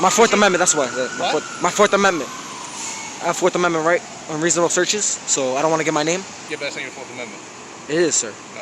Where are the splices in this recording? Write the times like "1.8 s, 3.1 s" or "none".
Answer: 6.4 s